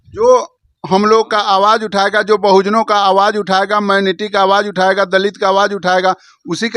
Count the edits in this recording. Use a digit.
0